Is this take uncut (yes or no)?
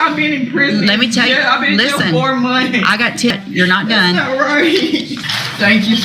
no